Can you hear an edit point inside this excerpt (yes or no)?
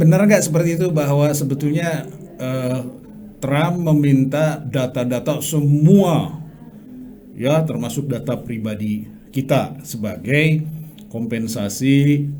no